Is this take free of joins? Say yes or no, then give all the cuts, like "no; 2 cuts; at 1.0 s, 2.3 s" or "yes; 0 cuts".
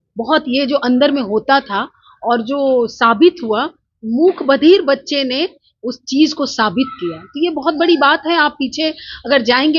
yes; 0 cuts